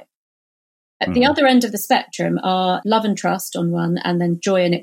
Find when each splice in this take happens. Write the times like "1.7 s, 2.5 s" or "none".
2.8 s